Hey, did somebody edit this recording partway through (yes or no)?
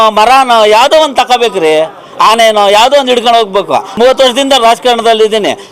yes